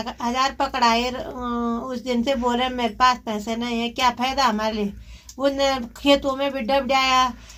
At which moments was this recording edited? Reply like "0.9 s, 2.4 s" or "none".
none